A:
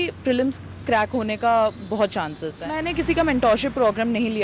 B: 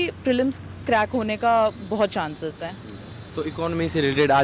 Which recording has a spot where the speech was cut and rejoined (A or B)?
A